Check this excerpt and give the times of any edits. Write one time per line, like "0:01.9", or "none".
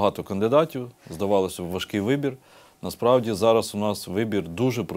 none